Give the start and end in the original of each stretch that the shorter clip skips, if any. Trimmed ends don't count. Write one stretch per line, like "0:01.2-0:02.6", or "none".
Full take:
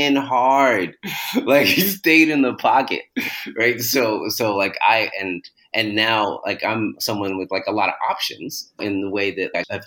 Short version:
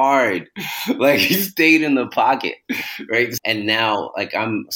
0:03.8-0:05.7